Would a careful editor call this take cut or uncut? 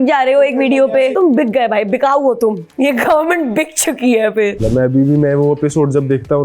cut